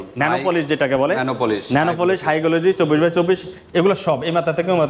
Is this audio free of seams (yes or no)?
yes